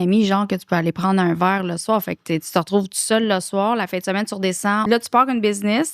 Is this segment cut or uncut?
cut